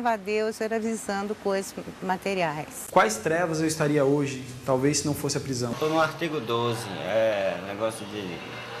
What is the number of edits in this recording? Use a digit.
2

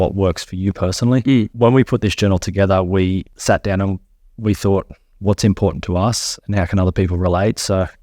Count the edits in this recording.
2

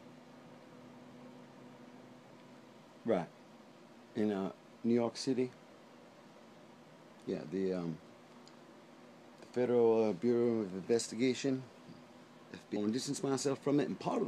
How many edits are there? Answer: 0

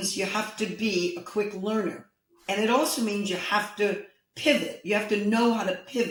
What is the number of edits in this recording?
0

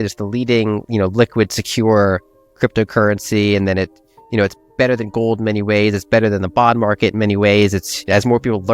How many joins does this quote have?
0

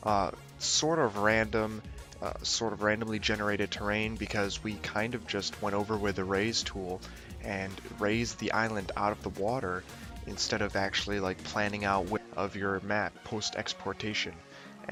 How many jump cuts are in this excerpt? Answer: 0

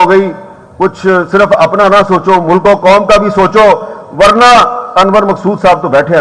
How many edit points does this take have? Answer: 0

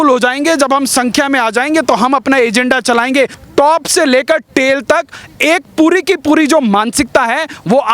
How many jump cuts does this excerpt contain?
1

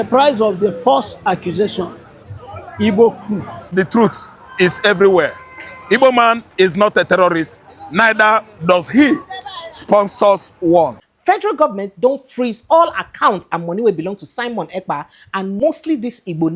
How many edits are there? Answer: 3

